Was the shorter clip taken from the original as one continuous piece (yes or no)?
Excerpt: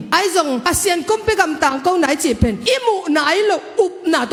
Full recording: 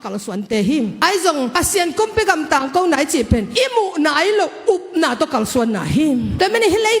yes